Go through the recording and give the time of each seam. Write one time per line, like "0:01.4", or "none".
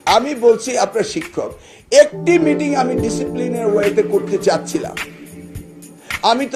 none